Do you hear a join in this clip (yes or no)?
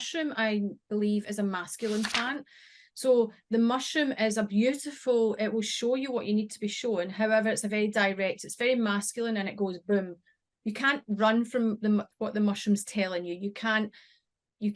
no